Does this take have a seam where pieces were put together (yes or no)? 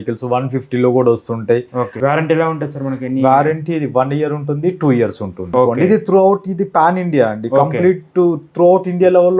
yes